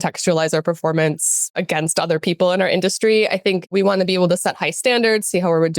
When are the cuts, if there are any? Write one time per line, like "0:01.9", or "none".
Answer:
0:01.6
0:03.7